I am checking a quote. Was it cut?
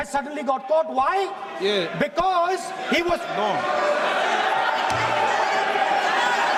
no; 0 cuts

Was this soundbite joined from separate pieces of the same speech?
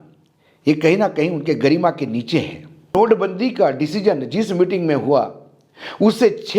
yes; 1 cut; at 2.9 s

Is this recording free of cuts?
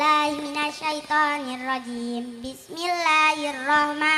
yes; 0 cuts

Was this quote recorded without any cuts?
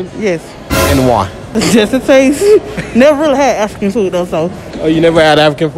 no; 2 cuts; at 1.4 s, 4.7 s

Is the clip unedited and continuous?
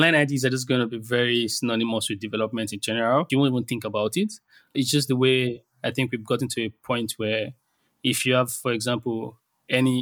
no; 2 cuts; at 3.3 s, 4.7 s

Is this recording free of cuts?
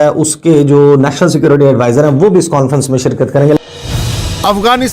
yes; 0 cuts

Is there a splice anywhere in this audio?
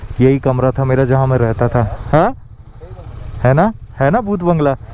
no; 0 cuts

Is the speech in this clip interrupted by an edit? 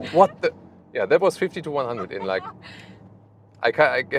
no; 0 cuts

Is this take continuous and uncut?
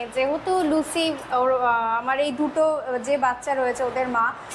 yes; 0 cuts

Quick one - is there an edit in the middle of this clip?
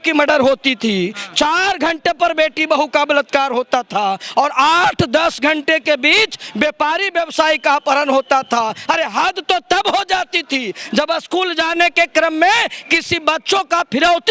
no; 0 cuts

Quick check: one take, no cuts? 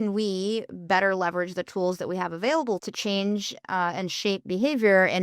no; 1 cut; at 2.8 s

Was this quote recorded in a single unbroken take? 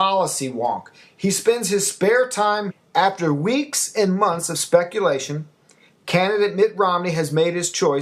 yes; 0 cuts

